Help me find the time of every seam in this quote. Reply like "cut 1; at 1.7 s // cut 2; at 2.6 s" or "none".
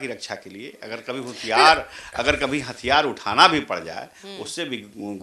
none